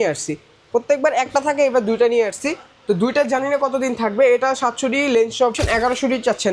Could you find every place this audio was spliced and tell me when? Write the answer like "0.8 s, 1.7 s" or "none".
5.6 s